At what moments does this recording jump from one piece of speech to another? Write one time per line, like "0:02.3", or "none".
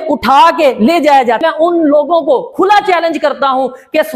0:01.4